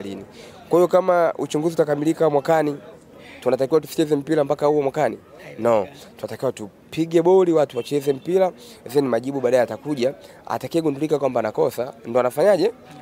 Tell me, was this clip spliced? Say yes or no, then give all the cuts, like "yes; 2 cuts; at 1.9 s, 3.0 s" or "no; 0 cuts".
no; 0 cuts